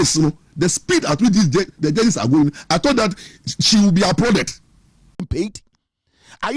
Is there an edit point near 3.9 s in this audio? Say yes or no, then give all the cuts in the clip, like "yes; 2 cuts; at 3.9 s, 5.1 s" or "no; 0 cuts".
no; 1 cut; at 5.1 s